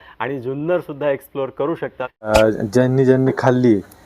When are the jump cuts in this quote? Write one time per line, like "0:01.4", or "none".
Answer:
0:02.3